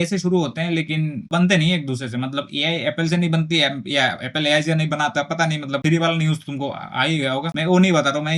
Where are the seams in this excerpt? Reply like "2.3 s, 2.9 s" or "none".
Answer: none

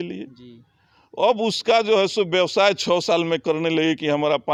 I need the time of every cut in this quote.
none

